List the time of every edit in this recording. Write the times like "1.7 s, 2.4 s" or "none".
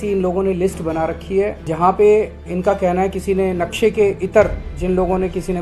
1.6 s, 4.7 s